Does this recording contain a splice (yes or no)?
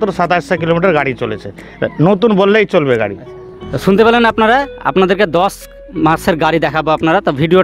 no